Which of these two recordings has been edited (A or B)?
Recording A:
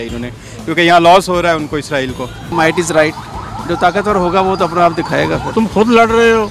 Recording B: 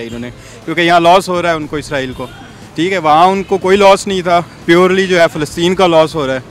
A